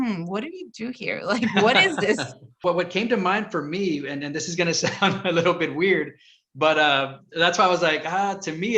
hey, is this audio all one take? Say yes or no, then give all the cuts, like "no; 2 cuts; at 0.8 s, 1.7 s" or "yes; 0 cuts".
no; 1 cut; at 2.6 s